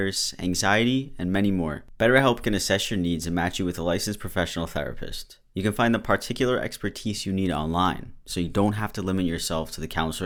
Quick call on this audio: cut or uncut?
uncut